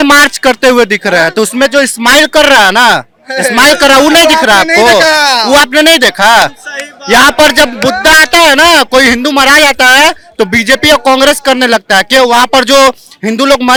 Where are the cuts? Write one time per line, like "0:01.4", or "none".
none